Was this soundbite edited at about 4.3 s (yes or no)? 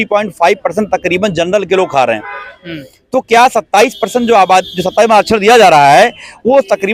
no